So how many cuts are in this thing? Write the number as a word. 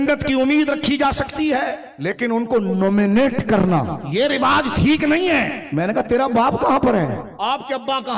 four